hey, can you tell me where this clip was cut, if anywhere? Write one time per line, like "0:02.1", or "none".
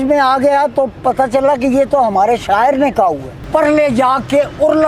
0:03.3